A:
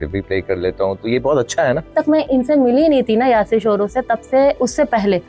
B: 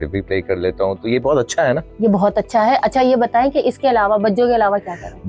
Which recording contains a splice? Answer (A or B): A